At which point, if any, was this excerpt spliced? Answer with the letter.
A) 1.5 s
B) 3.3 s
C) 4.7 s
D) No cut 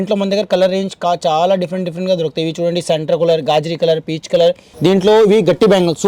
C